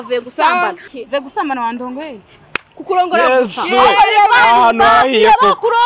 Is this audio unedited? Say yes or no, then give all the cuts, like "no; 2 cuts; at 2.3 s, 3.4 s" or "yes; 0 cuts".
no; 1 cut; at 1.0 s